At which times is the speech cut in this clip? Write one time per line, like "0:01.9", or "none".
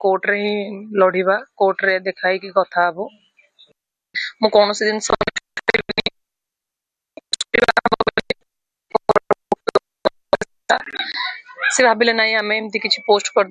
0:09.9